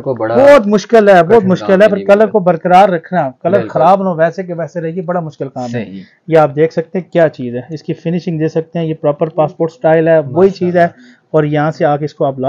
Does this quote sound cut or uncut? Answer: uncut